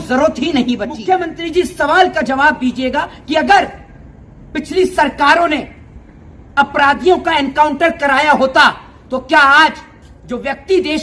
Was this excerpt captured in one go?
no; 1 cut; at 1.0 s

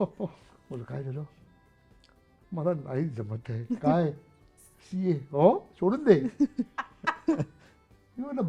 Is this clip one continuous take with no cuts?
yes; 0 cuts

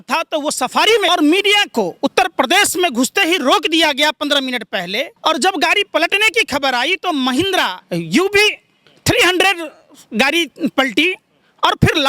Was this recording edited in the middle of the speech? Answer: yes; 3 cuts; at 1.1 s, 5.1 s, 7.8 s

